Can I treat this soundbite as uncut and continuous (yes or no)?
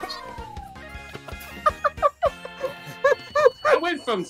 yes